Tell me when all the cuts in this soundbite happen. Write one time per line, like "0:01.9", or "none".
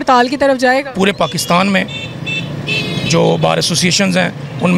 0:00.9

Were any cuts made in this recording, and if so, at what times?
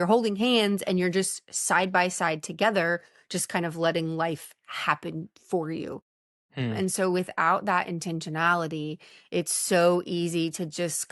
none

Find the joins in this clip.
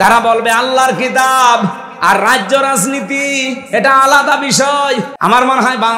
0:05.1

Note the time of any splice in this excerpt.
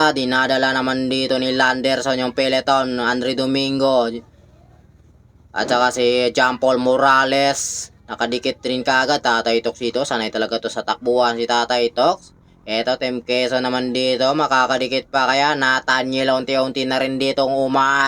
none

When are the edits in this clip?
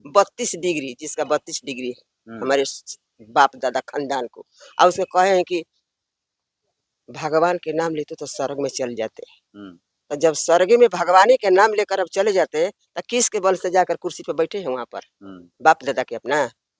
none

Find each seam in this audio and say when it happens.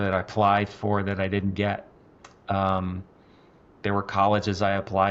none

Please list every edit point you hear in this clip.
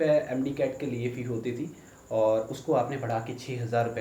none

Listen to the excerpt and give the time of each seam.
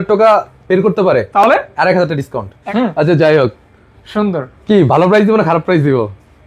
0:02.5

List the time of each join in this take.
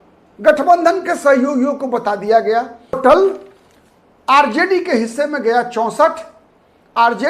0:03.0

